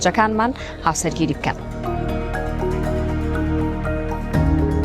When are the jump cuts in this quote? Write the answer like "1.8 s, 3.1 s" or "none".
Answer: 1.7 s